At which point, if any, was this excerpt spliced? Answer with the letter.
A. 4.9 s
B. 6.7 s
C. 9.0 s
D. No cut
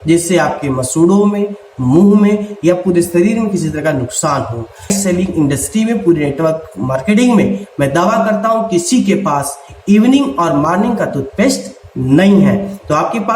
A